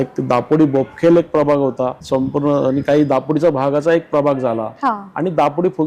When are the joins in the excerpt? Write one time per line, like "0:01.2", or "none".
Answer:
0:02.0